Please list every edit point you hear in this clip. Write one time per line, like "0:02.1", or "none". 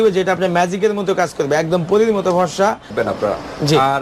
0:02.9